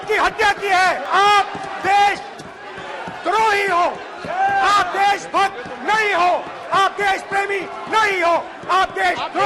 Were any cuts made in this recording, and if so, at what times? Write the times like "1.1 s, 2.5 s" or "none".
1.0 s